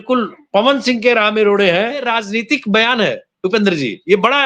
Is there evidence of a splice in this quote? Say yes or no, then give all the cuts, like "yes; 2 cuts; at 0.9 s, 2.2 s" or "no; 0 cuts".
yes; 1 cut; at 2.0 s